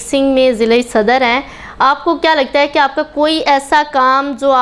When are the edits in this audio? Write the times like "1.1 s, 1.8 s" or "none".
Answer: none

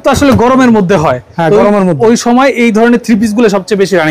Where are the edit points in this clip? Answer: none

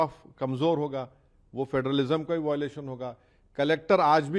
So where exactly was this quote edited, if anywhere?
none

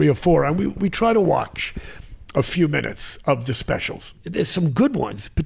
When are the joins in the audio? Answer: 4.2 s

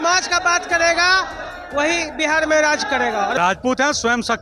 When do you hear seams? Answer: 3.4 s

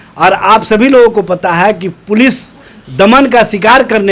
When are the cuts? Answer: none

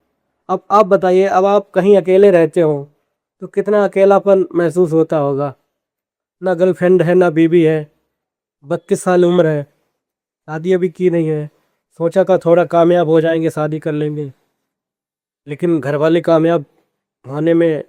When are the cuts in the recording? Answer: none

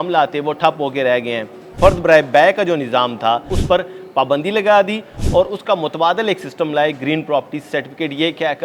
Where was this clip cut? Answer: 1.7 s, 3.6 s

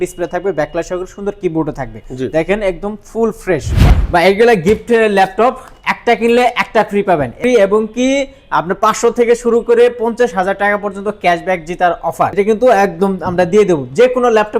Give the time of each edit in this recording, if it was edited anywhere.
3.8 s, 7.4 s, 12.3 s

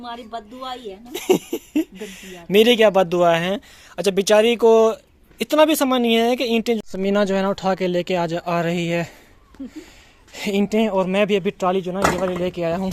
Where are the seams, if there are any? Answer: 6.8 s

